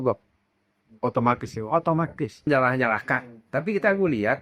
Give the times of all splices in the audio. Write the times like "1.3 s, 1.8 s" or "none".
2.5 s